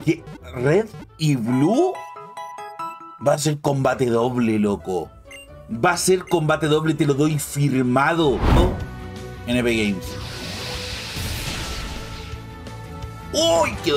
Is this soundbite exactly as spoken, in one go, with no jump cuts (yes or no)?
no